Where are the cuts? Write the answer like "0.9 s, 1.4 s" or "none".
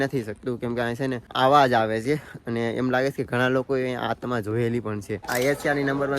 1.2 s, 5.3 s